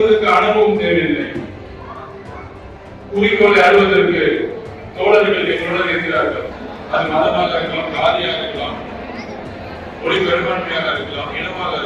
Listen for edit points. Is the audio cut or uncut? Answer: cut